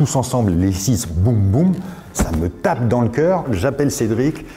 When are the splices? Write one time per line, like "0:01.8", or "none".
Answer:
0:03.5